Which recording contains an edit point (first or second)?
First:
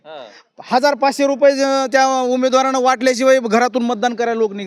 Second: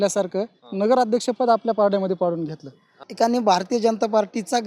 second